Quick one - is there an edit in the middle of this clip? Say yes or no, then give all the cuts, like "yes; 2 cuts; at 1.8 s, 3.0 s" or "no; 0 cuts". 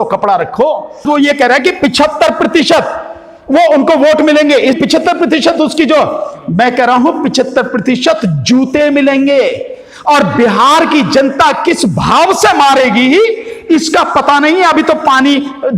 yes; 2 cuts; at 1.0 s, 4.8 s